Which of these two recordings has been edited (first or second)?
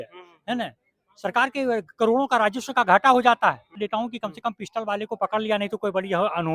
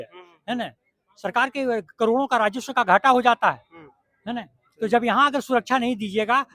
first